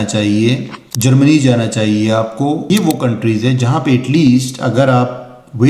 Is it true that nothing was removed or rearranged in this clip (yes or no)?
no